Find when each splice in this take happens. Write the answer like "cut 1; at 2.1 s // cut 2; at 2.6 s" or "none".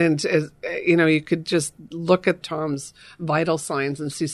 cut 1; at 2.4 s